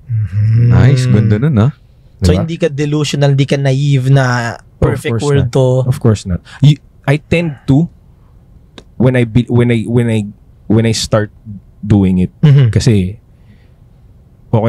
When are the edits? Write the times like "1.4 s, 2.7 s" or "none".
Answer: none